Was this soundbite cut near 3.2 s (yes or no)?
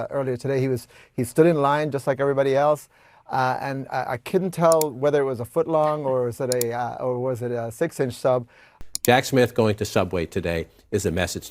no